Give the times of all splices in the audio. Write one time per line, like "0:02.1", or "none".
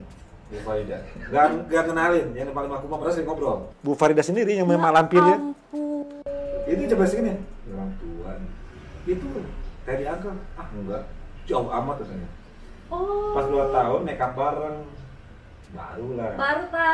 0:03.7